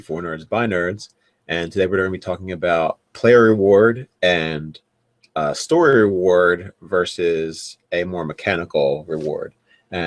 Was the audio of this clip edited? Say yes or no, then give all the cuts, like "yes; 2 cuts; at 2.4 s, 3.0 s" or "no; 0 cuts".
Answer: yes; 1 cut; at 1.4 s